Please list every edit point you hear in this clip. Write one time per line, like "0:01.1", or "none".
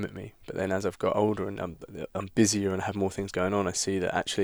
none